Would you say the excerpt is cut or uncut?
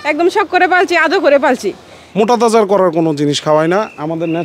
cut